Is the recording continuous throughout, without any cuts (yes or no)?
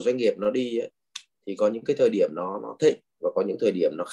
yes